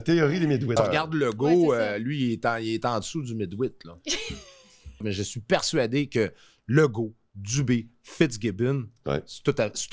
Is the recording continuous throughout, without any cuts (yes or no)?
no